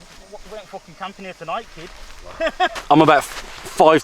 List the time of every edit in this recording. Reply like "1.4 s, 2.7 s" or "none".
2.7 s

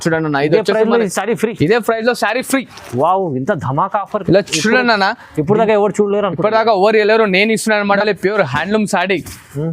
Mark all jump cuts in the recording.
8.0 s

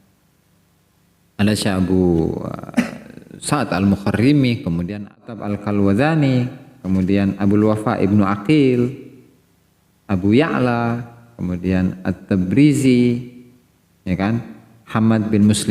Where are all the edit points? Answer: 5.2 s

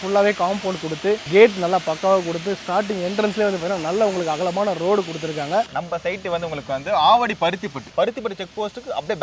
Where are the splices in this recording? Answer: 5.7 s, 7.8 s

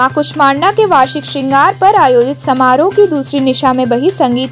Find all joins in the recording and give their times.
none

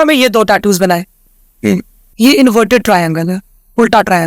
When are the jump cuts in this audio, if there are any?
2.0 s

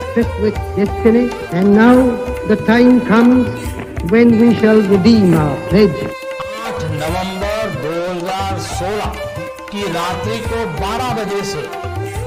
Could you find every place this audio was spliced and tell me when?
none

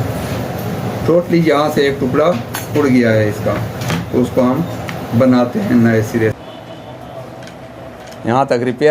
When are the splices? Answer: 6.4 s

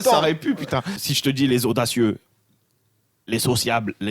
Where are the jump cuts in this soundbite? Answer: 1.0 s

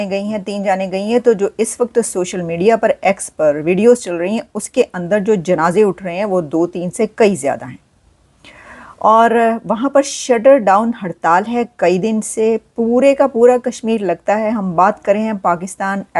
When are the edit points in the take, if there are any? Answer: none

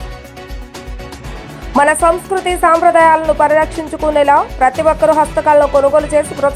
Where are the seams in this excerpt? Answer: 1.1 s

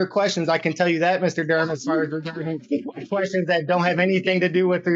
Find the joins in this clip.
none

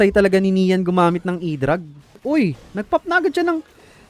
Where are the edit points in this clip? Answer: 2.2 s

